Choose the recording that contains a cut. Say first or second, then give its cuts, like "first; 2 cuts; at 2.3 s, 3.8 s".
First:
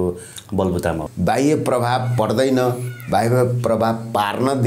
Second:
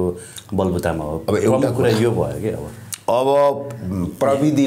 first; 1 cut; at 1.1 s